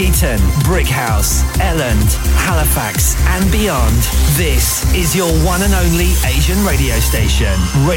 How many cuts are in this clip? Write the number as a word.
zero